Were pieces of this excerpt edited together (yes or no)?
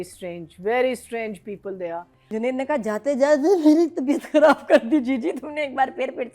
yes